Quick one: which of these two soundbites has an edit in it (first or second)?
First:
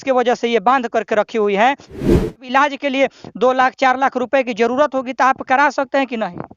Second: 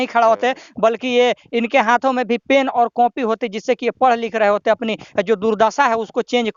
first